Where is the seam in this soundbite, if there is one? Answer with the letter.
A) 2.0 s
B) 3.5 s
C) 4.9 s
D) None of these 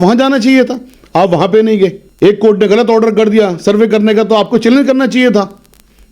A